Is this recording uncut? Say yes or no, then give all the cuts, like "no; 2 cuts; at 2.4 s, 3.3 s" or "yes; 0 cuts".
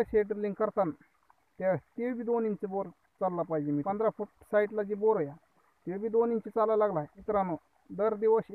no; 2 cuts; at 3.8 s, 7.1 s